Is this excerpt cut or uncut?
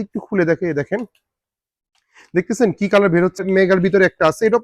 cut